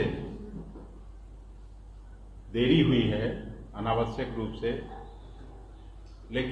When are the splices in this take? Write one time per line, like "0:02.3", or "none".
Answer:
none